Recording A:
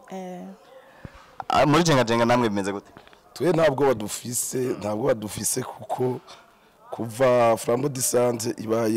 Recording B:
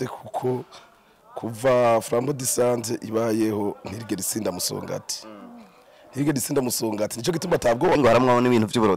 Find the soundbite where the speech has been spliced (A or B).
B